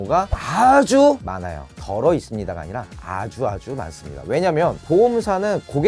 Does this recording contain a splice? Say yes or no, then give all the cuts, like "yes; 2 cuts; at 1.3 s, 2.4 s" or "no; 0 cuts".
no; 0 cuts